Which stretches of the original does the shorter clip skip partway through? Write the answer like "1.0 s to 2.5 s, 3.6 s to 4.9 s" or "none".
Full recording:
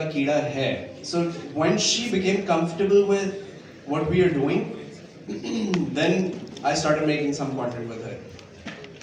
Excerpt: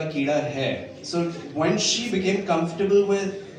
none